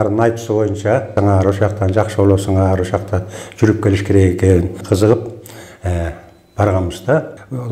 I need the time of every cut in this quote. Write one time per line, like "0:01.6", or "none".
0:01.1
0:04.8